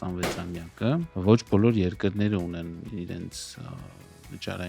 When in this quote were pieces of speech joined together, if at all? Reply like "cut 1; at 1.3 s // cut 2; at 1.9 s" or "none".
cut 1; at 1.1 s